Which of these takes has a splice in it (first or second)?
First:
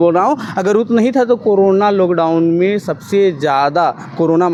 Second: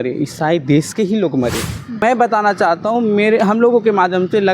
second